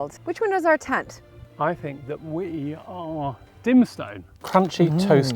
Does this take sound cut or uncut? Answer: cut